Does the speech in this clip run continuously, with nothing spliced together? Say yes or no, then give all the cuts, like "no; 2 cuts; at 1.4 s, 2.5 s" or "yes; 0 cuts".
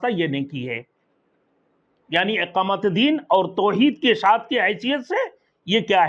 yes; 0 cuts